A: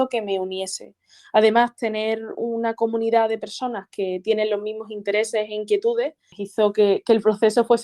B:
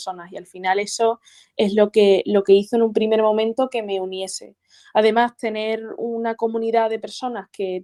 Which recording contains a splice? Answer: A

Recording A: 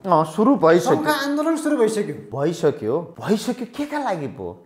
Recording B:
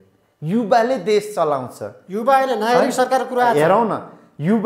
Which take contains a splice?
A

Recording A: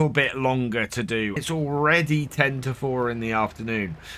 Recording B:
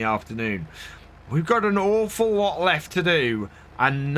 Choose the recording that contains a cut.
A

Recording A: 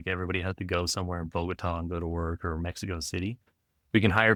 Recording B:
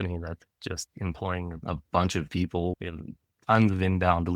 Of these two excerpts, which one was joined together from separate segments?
B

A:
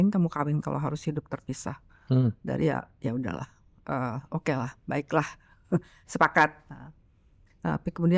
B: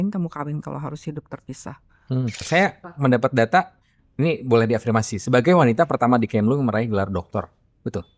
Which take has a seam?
B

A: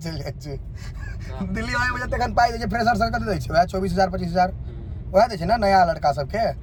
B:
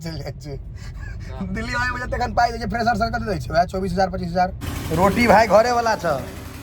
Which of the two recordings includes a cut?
B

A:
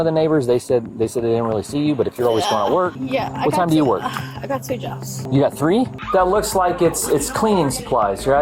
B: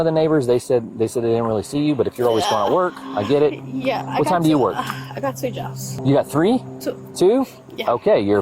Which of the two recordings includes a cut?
A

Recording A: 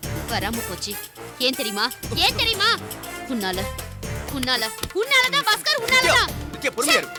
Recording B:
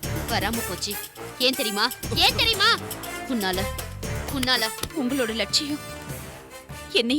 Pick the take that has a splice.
B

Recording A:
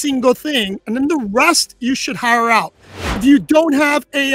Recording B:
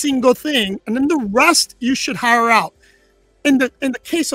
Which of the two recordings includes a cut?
A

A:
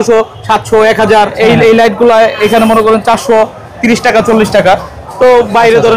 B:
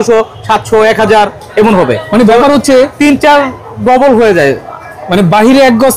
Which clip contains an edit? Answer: A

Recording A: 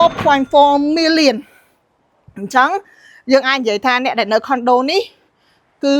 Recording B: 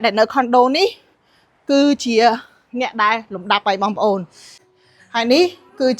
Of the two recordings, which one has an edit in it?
B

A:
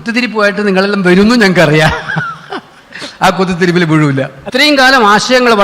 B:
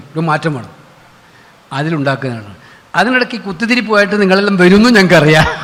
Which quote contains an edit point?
A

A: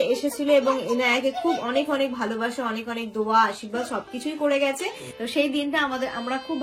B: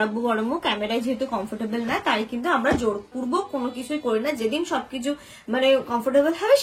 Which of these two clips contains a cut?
A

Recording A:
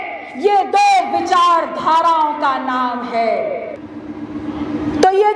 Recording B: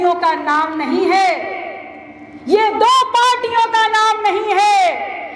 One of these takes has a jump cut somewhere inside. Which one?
A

